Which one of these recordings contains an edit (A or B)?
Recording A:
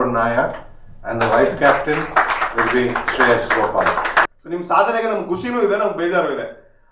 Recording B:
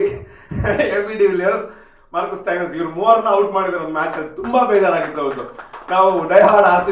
A